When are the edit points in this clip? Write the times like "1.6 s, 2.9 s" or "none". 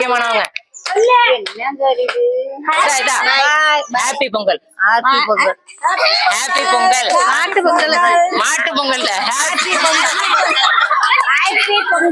2.8 s